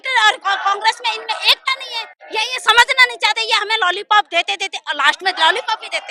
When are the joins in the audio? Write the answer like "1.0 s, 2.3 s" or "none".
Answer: none